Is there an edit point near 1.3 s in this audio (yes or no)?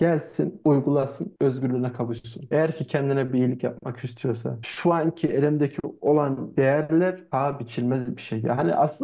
no